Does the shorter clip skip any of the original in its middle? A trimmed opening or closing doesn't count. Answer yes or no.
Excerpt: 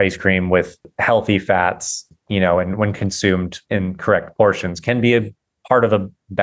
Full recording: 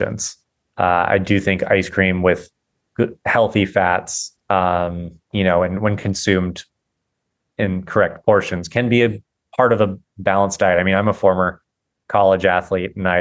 yes